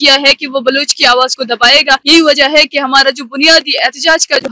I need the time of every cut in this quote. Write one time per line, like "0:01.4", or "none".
0:02.0